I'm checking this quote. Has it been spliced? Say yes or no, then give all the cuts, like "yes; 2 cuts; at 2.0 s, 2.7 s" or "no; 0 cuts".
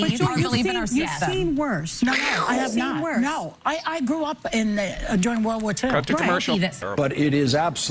yes; 1 cut; at 6.8 s